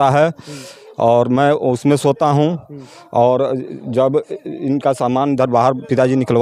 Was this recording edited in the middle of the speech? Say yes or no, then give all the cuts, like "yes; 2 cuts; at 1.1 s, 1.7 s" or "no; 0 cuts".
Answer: no; 0 cuts